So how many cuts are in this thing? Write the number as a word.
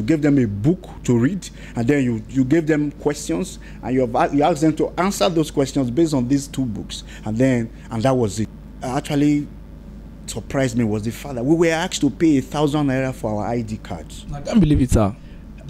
one